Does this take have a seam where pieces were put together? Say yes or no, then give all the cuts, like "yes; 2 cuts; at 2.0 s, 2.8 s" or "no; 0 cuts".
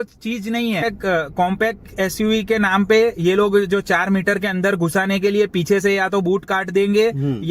yes; 1 cut; at 1.4 s